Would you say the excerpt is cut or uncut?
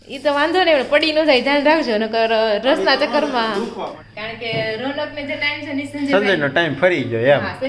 cut